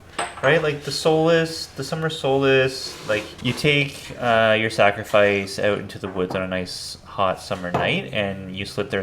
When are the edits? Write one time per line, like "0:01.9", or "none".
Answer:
0:03.3